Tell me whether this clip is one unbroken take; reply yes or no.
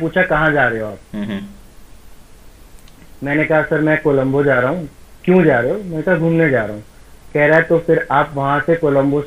yes